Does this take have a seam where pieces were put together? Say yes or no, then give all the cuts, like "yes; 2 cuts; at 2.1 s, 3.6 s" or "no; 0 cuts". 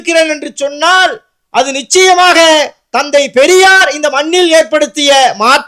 no; 0 cuts